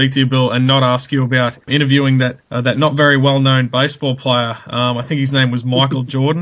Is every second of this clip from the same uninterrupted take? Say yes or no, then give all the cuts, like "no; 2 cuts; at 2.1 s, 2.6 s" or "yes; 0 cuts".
yes; 0 cuts